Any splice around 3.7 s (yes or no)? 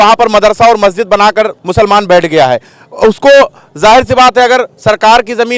no